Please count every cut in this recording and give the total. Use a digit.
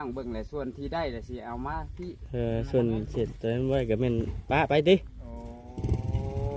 0